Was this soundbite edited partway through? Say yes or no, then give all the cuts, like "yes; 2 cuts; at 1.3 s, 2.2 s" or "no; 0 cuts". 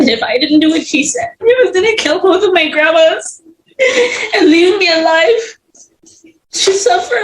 yes; 1 cut; at 1.3 s